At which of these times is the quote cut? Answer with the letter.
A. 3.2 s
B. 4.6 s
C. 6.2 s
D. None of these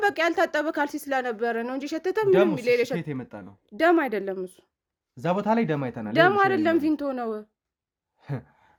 D